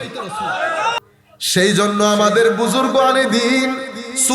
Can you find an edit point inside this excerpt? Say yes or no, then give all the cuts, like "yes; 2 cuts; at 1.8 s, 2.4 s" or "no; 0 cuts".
yes; 1 cut; at 1.0 s